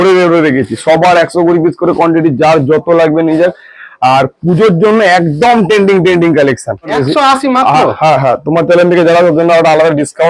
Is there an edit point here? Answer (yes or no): yes